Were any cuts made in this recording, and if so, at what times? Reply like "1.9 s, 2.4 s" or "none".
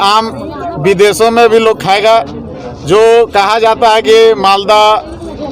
none